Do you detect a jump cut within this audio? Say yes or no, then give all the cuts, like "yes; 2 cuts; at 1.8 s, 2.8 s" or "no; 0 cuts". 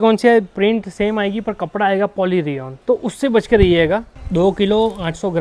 yes; 2 cuts; at 2.7 s, 4.2 s